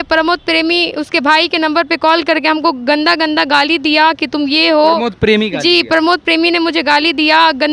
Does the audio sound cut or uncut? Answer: uncut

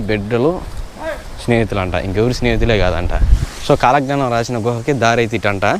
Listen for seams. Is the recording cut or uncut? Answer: cut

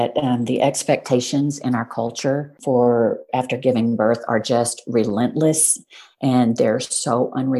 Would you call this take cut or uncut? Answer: cut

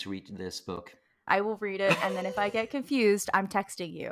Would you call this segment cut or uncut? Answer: cut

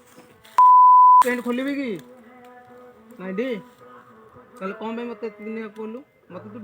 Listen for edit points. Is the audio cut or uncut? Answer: cut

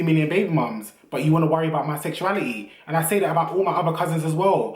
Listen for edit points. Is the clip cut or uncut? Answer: uncut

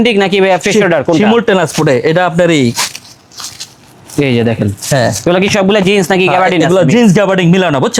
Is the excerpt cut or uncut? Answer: uncut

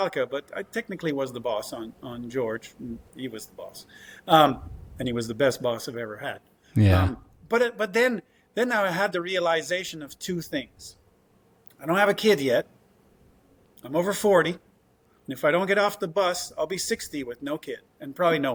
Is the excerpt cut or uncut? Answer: uncut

